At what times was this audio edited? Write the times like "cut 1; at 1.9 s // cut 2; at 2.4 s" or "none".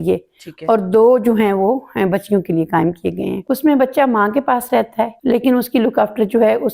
cut 1; at 3.4 s // cut 2; at 5.2 s